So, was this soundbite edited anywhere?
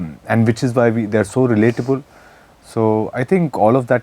no; 0 cuts

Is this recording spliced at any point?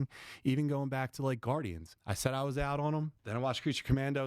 yes; 2 cuts; at 2.0 s, 3.2 s

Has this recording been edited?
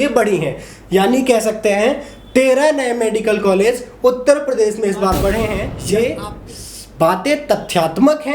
yes; 1 cut; at 5.7 s

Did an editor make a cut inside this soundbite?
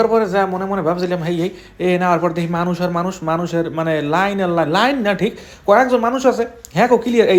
no; 0 cuts

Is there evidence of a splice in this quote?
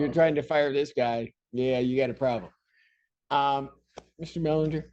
no; 0 cuts

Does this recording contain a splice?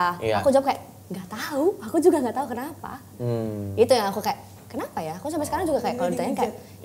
no; 0 cuts

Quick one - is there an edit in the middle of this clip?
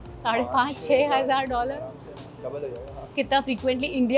yes; 1 cut; at 3.1 s

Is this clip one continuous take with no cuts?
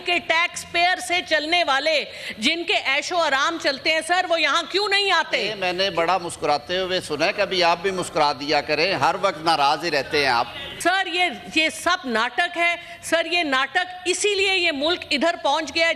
no; 2 cuts; at 5.5 s, 10.7 s

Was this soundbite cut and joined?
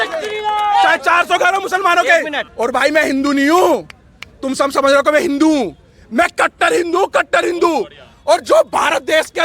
yes; 1 cut; at 2.4 s

